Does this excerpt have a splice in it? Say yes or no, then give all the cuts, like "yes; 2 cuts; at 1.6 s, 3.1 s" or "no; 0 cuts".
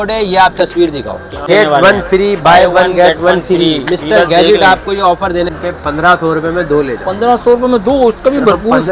yes; 2 cuts; at 1.3 s, 5.5 s